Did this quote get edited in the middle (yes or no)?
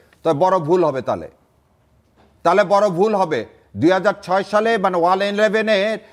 no